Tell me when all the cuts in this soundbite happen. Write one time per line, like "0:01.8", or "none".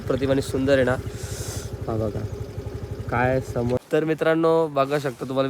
0:03.8